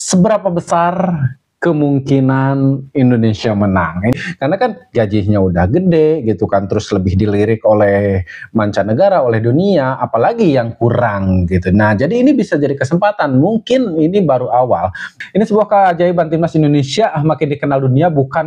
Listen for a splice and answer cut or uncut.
cut